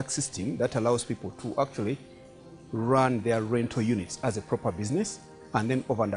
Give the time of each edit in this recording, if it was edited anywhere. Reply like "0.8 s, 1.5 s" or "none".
none